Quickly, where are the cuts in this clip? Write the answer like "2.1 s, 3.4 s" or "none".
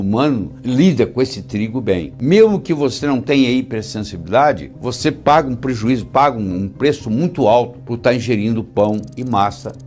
none